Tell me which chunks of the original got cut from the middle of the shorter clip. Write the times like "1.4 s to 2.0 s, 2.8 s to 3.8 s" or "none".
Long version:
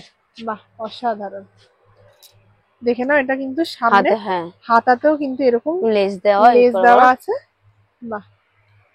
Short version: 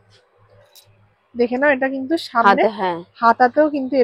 none